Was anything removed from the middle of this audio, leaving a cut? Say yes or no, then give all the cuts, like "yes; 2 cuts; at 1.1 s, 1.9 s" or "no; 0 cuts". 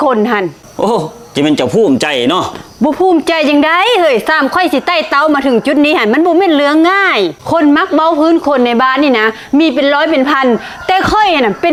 no; 0 cuts